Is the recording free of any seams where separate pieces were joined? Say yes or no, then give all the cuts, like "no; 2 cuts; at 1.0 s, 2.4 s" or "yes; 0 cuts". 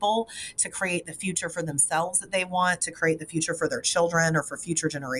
yes; 0 cuts